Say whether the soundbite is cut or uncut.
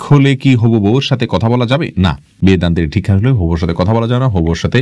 uncut